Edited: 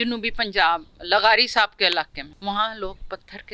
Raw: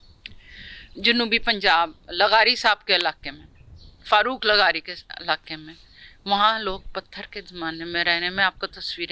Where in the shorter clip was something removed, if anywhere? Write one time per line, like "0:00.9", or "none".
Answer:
0:02.2